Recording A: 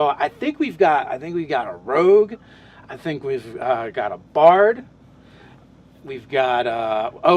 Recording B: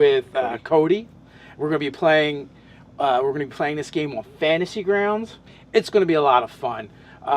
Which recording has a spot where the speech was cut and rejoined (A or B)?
A